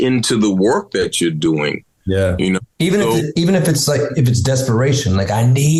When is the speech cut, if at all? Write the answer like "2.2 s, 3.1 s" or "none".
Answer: none